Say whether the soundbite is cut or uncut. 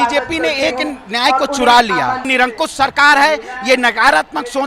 cut